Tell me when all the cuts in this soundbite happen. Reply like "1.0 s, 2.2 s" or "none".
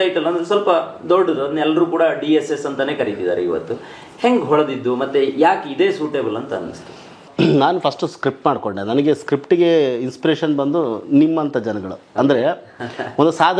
none